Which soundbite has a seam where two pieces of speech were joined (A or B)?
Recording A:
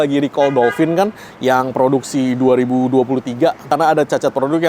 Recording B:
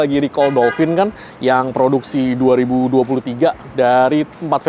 A